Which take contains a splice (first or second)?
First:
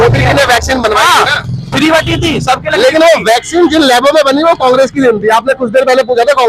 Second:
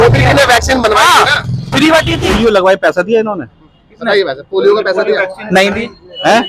second